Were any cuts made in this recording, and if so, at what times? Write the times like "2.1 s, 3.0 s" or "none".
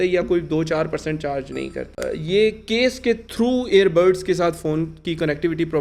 none